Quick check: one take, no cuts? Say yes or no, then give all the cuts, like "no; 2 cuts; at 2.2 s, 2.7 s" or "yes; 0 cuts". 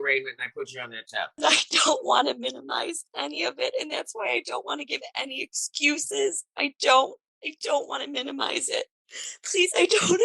no; 2 cuts; at 1.4 s, 9.0 s